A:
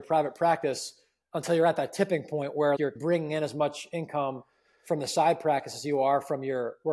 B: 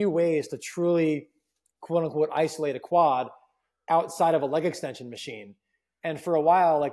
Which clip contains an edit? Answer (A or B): A